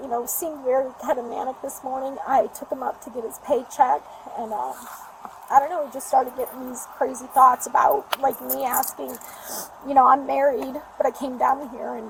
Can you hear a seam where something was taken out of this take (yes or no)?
no